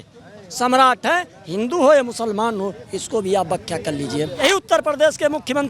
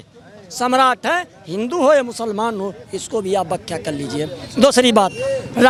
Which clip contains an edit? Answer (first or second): first